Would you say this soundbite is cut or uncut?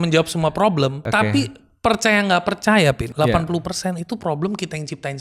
cut